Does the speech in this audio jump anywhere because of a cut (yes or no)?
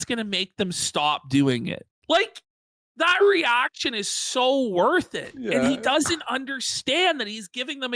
no